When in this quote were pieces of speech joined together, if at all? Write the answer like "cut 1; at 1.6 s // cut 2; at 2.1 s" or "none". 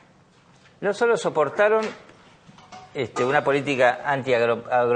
cut 1; at 1.2 s